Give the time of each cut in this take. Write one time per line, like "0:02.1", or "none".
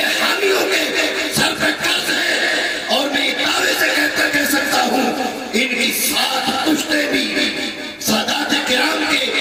none